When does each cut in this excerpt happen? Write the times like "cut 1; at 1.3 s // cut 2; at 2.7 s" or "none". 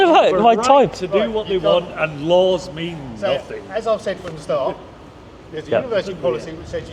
none